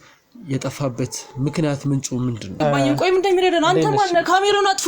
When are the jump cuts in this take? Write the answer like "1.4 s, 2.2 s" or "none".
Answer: 2.6 s